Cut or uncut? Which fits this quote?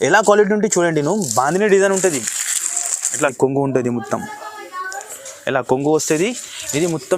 cut